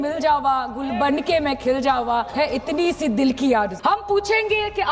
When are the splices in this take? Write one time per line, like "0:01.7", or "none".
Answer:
0:02.3
0:03.7